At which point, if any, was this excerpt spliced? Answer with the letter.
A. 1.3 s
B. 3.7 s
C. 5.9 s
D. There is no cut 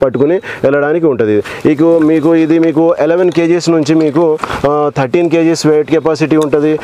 D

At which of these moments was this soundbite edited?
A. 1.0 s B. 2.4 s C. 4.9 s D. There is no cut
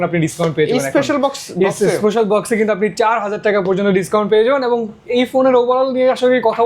D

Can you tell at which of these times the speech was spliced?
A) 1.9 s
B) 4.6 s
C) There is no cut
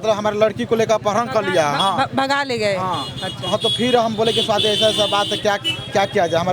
C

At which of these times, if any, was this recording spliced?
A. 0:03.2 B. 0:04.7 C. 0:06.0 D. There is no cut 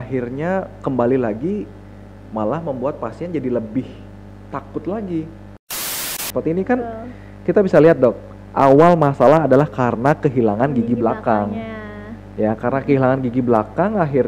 C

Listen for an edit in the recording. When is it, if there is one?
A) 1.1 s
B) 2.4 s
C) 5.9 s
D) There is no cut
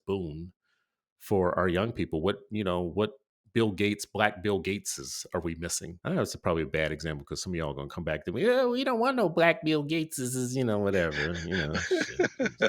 C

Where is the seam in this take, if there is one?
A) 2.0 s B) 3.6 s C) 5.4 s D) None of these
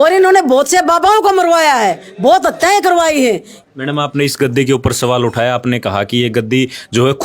B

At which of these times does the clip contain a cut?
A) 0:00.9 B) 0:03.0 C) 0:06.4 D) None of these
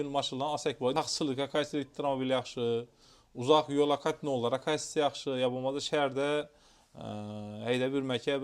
A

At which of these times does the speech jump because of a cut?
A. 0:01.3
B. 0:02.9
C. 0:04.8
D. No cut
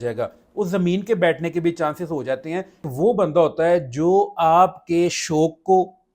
B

